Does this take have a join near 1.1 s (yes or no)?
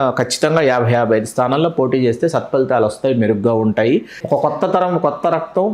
no